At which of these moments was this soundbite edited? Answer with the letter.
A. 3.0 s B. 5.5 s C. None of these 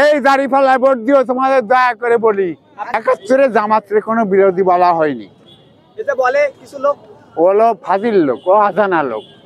A